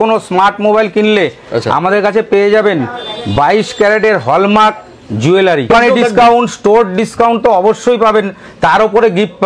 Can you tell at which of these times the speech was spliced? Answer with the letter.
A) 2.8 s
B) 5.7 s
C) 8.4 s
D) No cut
B